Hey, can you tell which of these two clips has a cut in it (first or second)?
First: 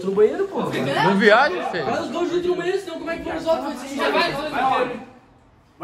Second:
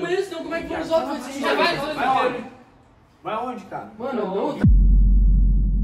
second